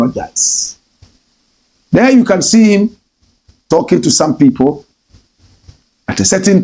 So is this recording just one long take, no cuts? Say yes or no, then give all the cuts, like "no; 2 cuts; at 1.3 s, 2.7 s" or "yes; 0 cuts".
yes; 0 cuts